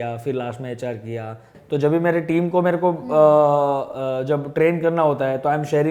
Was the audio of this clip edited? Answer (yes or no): yes